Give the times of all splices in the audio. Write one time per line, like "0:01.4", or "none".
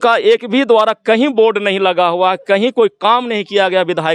none